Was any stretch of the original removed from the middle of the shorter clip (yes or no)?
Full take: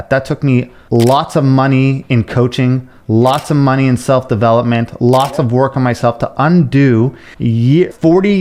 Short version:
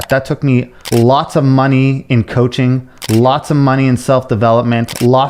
no